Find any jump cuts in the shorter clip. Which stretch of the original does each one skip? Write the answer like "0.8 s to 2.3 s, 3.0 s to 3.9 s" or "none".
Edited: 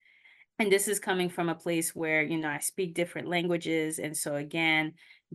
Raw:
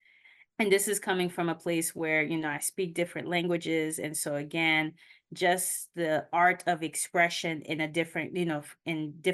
none